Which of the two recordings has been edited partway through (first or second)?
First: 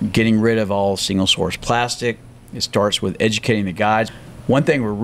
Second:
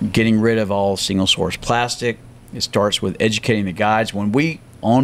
first